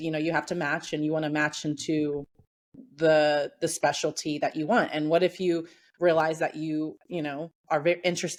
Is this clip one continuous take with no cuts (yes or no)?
yes